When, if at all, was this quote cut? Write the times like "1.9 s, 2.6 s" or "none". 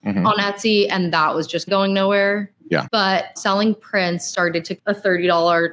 1.7 s, 3.3 s, 4.7 s